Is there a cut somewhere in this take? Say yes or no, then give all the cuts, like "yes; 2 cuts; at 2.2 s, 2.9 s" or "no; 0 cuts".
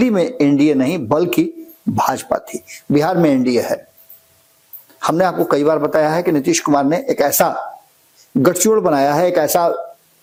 no; 0 cuts